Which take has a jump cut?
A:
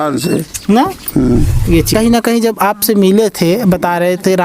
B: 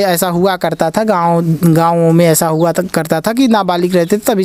A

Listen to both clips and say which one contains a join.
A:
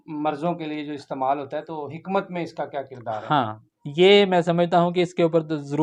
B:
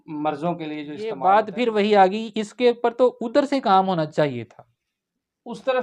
B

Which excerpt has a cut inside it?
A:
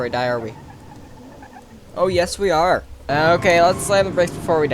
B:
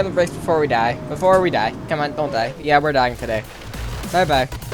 A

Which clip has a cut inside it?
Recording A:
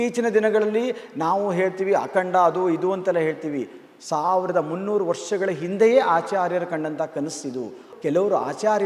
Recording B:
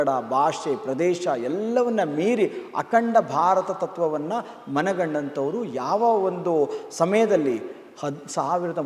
A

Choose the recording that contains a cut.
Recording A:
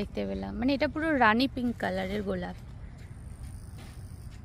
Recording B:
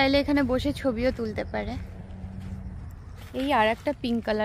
B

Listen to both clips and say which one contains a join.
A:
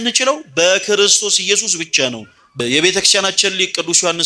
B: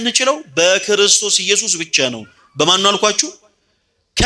A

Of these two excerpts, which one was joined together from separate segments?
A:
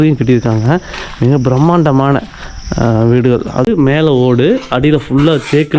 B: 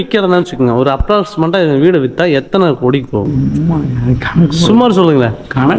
A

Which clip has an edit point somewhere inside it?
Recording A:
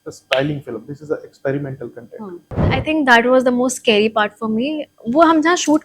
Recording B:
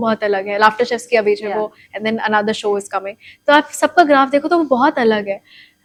A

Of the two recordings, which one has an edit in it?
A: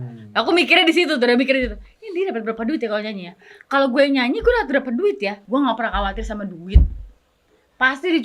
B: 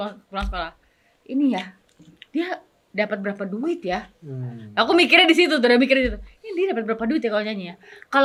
A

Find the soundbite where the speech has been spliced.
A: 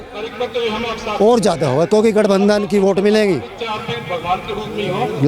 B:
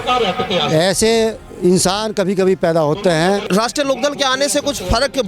B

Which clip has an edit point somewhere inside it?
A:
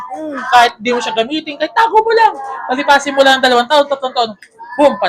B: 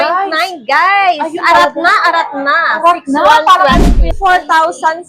B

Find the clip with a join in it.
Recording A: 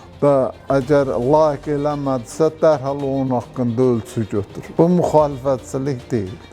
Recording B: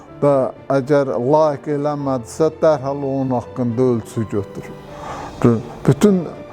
A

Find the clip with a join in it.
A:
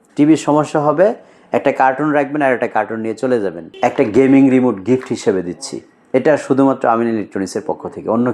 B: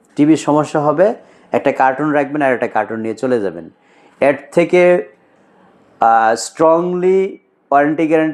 A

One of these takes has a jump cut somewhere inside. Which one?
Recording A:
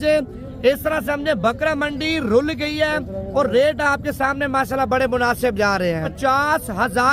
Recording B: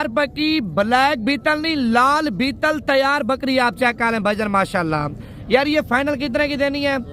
A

